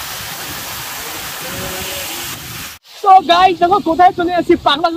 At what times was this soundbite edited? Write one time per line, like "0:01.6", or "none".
0:02.7